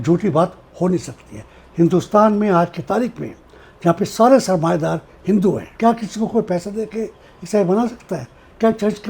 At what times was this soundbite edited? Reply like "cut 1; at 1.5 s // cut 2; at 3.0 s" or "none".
cut 1; at 5.7 s